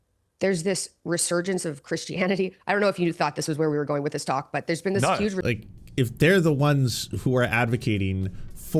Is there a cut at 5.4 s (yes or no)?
yes